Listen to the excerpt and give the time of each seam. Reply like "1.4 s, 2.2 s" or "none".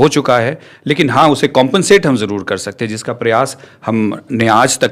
none